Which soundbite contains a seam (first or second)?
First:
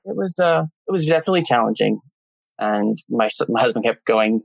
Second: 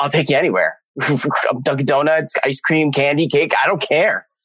first